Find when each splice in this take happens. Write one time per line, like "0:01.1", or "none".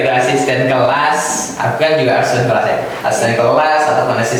none